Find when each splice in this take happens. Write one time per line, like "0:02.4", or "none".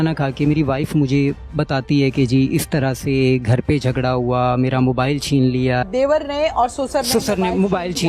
0:05.9